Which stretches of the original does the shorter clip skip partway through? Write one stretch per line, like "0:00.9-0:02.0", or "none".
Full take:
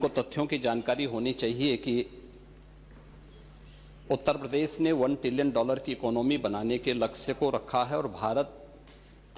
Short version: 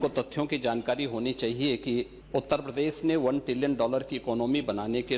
0:02.2-0:03.9